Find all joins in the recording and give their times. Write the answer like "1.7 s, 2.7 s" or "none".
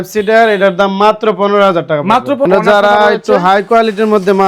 2.5 s